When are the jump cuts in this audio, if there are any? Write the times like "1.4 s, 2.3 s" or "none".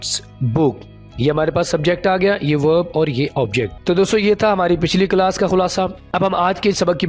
3.8 s, 6.0 s